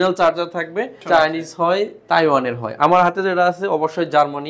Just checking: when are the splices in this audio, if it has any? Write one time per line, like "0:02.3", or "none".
0:01.0

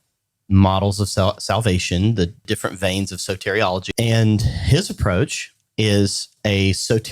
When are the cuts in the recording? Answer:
0:02.4
0:03.8

